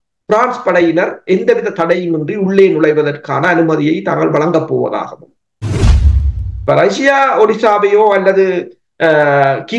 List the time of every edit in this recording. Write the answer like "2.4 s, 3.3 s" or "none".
5.9 s